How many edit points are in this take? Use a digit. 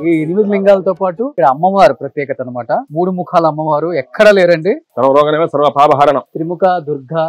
4